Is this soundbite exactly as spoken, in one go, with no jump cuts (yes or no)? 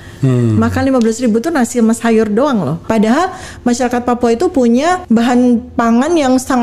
no